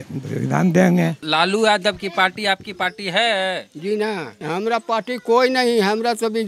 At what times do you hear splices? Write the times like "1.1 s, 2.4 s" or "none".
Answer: 1.2 s, 4.4 s